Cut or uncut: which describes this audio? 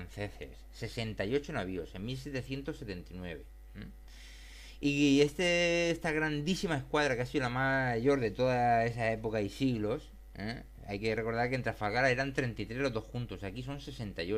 uncut